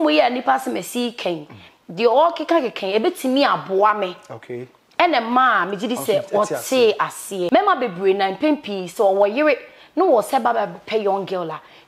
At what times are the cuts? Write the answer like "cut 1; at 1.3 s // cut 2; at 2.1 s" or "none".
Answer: cut 1; at 7.5 s